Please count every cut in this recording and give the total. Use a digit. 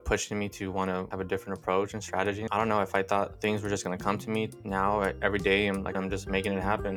5